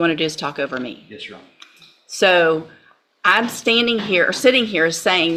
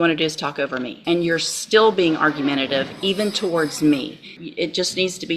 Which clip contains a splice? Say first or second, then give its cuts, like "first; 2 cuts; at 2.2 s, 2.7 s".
second; 2 cuts; at 1.0 s, 4.4 s